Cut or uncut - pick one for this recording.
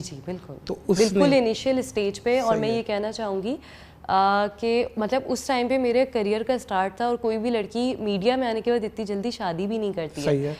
uncut